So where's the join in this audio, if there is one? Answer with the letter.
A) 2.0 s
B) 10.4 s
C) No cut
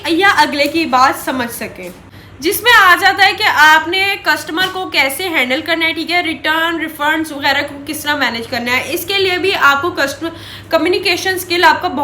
A